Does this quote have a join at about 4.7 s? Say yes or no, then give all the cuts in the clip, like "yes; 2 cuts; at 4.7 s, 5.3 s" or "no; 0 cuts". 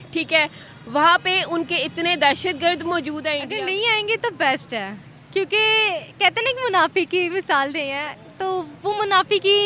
no; 1 cut; at 3.4 s